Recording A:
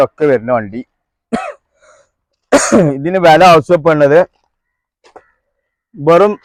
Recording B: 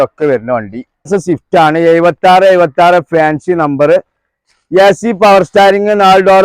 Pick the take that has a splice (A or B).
B